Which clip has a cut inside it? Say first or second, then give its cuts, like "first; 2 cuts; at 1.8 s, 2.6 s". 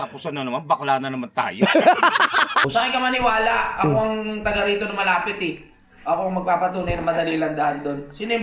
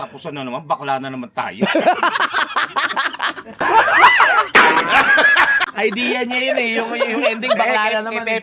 first; 1 cut; at 2.7 s